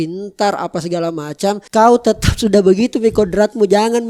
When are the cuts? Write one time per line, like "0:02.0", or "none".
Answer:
0:01.6